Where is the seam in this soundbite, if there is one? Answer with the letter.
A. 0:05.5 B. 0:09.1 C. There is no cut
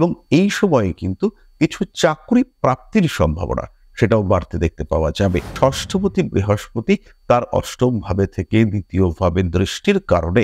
A